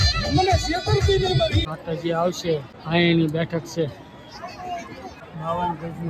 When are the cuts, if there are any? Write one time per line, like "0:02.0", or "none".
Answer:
0:01.6
0:05.3